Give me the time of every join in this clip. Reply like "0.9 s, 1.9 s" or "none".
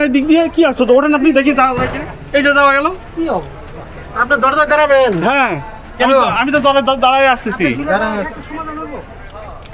none